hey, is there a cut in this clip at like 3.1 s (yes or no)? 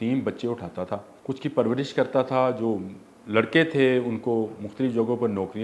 no